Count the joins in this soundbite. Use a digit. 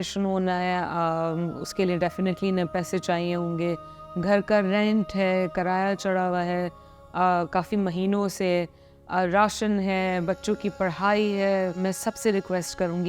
1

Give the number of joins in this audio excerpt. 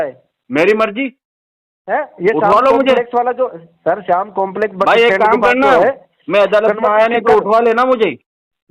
0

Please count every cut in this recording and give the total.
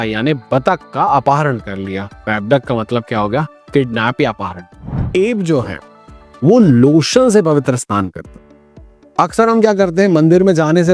1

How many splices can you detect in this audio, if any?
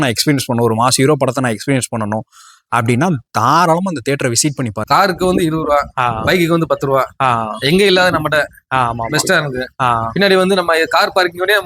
1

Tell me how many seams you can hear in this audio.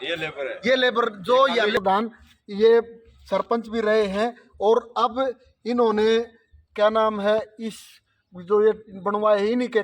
1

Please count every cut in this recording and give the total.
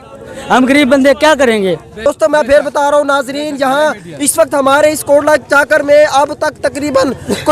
1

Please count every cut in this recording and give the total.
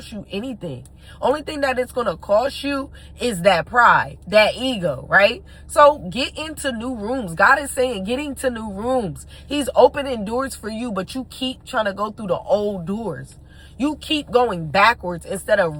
0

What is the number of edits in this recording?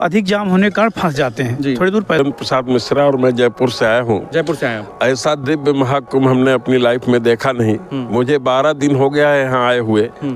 1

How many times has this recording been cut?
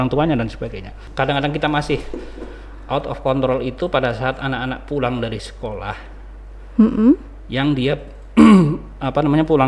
1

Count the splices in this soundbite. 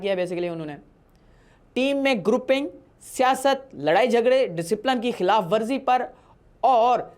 0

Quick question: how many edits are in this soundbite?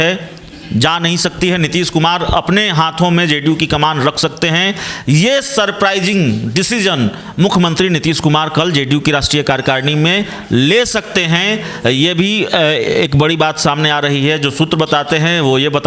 0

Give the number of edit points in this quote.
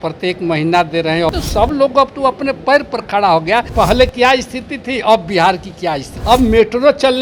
3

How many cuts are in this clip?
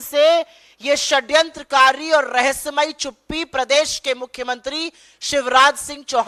0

